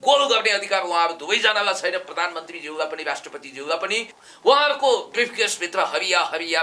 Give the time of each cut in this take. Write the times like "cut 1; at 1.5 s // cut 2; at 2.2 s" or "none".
cut 1; at 4.2 s